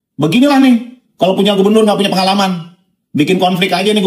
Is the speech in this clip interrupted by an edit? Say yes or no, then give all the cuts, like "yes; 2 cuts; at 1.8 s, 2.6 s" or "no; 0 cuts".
no; 0 cuts